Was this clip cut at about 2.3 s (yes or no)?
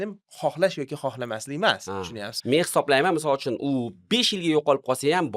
yes